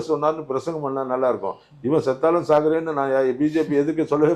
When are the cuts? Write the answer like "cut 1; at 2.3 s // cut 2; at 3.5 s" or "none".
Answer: none